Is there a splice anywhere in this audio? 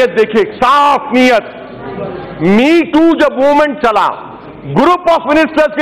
no; 0 cuts

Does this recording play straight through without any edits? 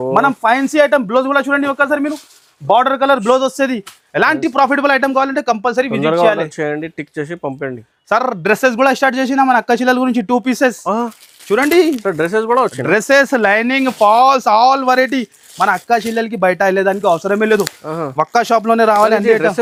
yes; 0 cuts

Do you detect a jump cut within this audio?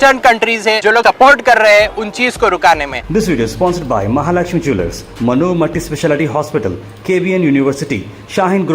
yes; 2 cuts; at 0.9 s, 3.0 s

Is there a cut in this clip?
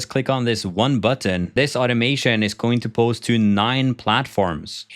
yes; 1 cut; at 1.6 s

